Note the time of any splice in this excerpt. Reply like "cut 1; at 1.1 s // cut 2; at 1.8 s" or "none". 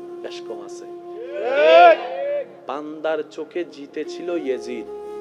cut 1; at 1.2 s